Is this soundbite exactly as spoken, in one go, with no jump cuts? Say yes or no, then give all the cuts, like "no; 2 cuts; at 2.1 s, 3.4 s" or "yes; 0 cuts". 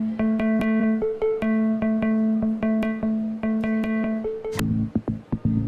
no; 1 cut; at 4.6 s